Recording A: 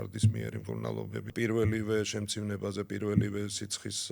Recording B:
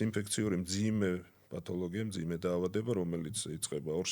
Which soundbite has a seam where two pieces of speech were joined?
A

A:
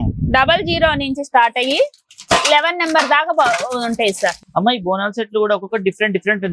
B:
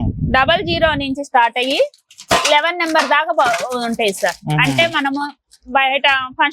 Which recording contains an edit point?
A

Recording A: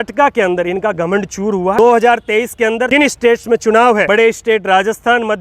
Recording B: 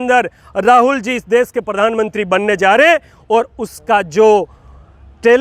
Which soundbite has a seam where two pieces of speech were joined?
A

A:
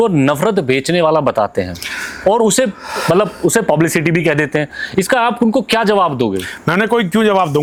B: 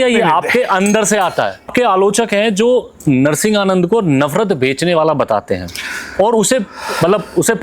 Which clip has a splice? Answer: B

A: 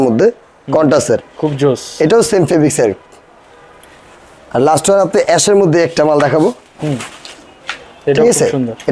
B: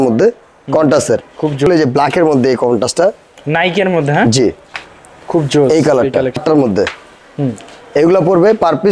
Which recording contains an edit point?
B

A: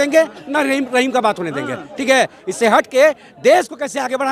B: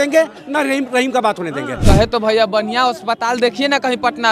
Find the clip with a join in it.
B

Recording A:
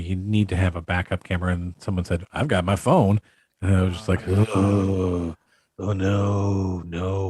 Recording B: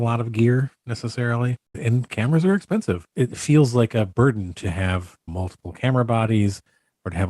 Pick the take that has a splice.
B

